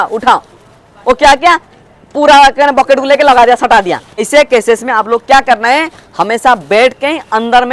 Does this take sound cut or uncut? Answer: cut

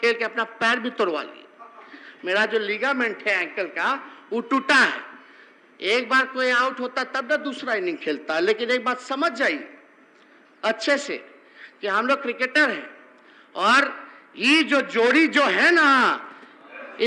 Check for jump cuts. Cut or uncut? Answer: uncut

